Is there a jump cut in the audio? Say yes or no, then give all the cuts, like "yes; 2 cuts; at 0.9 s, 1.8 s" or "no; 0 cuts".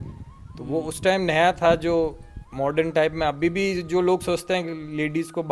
no; 0 cuts